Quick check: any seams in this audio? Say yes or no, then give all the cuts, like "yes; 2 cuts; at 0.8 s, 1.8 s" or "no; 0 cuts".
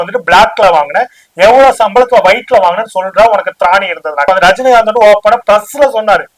yes; 1 cut; at 4.3 s